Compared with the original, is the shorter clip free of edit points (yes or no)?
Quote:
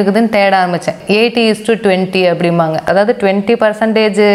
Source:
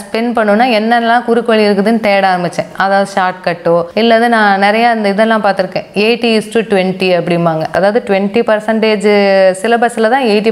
no